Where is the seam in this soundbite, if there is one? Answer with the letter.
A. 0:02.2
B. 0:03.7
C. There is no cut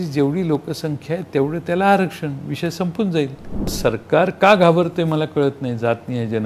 B